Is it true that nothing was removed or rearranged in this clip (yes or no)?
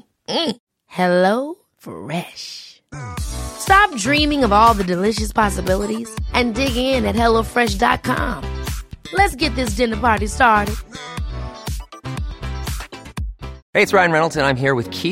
no